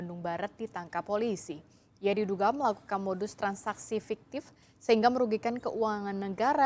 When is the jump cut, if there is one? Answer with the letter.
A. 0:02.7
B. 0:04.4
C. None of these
C